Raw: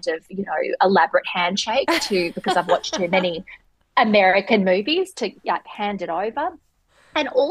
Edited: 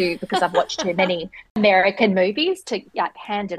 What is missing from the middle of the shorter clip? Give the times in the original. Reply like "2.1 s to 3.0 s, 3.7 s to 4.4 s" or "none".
3.7 s to 4.1 s